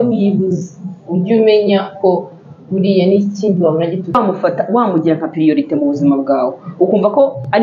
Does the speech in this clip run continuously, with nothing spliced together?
no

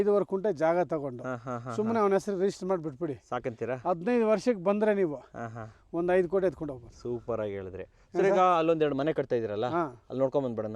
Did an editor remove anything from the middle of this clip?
no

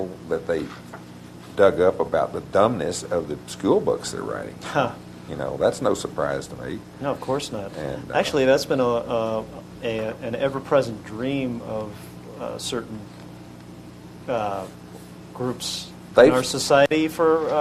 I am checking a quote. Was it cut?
no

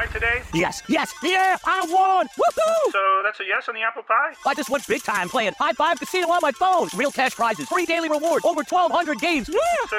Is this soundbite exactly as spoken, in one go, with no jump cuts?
yes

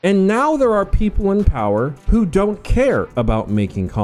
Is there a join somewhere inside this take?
no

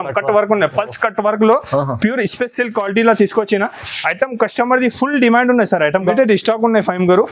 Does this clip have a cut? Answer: yes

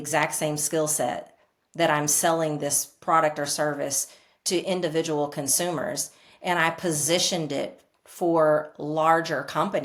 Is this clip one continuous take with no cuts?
yes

